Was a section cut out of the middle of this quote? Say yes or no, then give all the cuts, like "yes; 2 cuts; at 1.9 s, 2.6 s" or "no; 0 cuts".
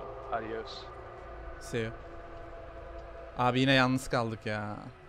no; 0 cuts